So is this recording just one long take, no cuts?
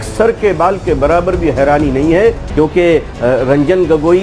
no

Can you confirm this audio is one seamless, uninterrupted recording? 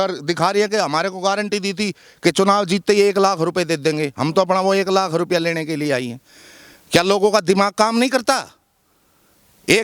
yes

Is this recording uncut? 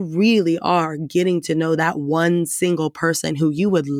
yes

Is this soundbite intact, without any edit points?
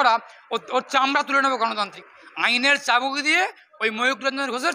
no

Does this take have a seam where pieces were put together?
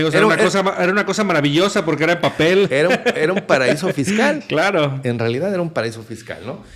no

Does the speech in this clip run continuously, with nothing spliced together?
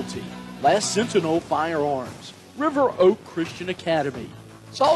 yes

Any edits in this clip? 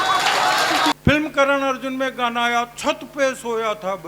yes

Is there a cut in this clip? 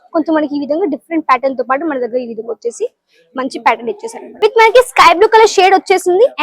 yes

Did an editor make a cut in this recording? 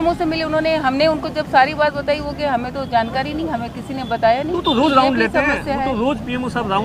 no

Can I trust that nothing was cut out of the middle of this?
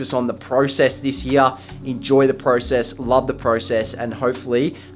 yes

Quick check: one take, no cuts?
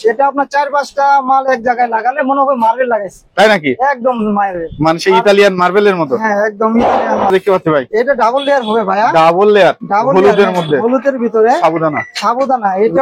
no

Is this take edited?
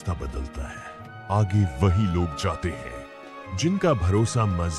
no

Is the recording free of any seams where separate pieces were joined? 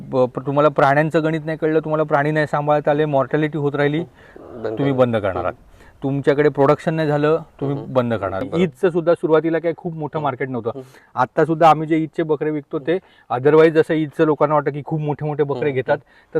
no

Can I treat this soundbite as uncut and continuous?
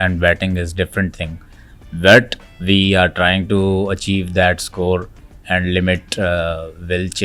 yes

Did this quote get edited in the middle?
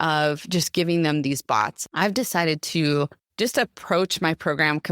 yes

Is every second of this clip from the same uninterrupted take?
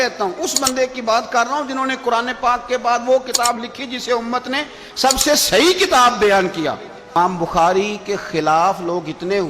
no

